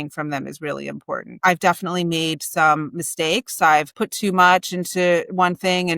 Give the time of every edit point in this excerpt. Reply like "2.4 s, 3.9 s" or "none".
1.3 s, 3.9 s